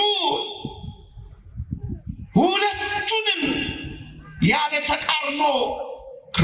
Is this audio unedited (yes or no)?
yes